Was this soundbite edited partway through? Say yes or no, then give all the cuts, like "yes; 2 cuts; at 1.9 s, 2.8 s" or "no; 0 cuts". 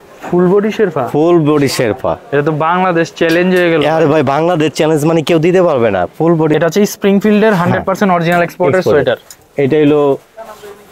yes; 1 cut; at 6.5 s